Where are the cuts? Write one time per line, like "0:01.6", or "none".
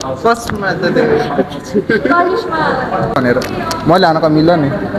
0:03.2